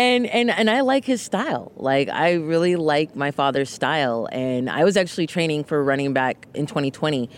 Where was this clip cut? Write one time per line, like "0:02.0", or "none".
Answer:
0:06.4